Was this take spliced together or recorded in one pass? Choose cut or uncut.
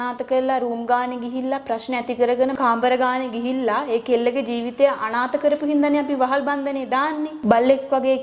cut